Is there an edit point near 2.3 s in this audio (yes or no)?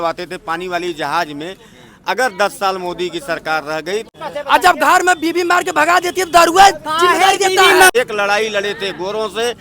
no